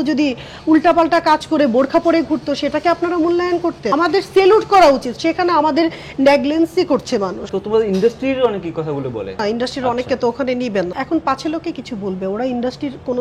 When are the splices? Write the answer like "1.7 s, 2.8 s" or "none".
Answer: 3.9 s, 7.5 s, 9.4 s, 11.0 s

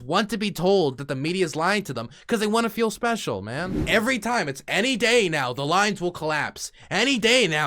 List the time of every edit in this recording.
3.8 s

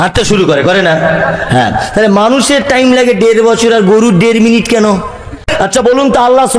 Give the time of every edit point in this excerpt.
5.5 s

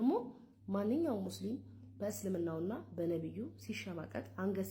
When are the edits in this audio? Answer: none

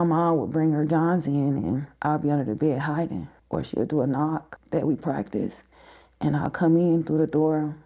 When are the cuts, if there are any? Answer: 3.3 s, 4.5 s

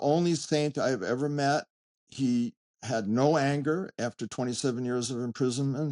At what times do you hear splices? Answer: none

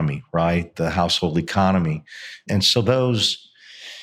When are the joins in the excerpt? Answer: 2.5 s

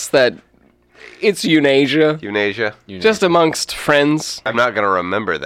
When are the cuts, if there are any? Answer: 4.4 s

